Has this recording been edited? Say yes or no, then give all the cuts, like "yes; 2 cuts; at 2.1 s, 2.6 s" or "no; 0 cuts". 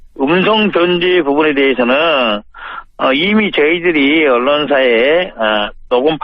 yes; 1 cut; at 4.4 s